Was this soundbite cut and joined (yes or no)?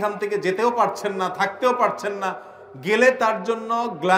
no